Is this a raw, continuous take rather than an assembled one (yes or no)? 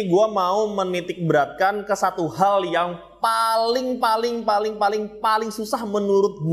yes